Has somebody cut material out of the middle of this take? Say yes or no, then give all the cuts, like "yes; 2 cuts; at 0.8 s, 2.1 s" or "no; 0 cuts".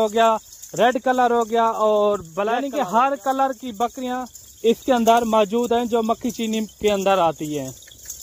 yes; 1 cut; at 2.6 s